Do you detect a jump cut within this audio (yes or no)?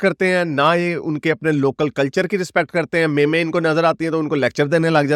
no